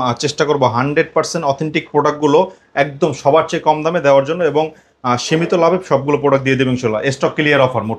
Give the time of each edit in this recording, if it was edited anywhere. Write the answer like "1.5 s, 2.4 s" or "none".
none